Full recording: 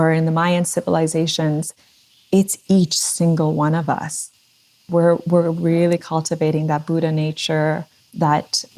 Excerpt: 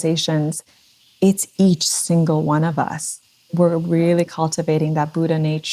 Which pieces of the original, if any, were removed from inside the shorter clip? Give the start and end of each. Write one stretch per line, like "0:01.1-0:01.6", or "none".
0:04.6-0:05.2

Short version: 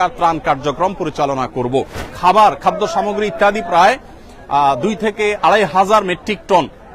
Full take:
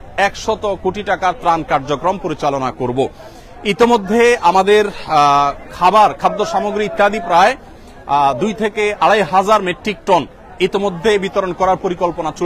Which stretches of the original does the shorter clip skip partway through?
0:03.3-0:05.6

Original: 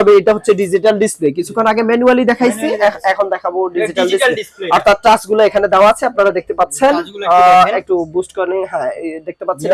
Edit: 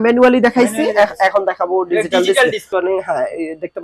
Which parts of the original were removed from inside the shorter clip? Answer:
0:04.5-0:08.3

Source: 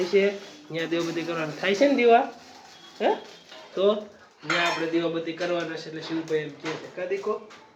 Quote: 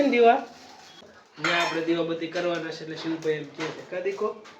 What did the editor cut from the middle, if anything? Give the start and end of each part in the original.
0:02.9-0:04.1

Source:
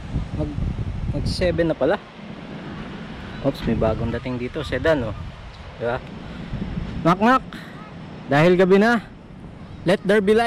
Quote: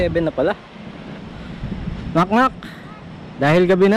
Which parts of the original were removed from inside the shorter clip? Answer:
0:02.6-0:06.1

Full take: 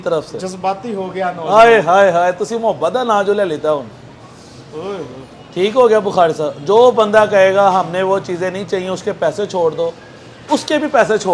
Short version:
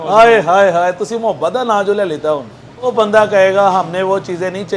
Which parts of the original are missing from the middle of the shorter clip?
0:04.3-0:06.9

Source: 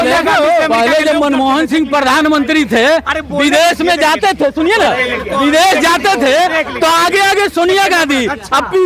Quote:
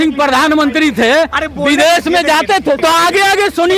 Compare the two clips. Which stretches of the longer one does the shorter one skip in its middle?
0:04.5-0:06.8

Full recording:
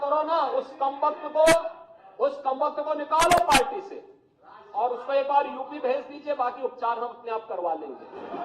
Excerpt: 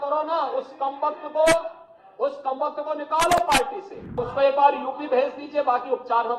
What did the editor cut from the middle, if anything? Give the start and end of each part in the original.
0:04.3-0:05.0

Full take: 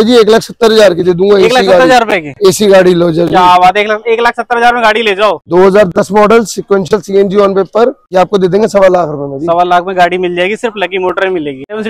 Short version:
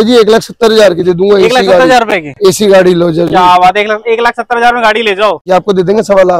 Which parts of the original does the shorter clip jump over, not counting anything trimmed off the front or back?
0:05.4-0:08.0

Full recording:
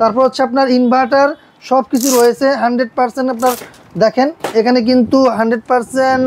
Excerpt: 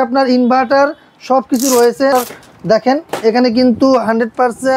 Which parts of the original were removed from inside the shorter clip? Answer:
0:02.5-0:03.4

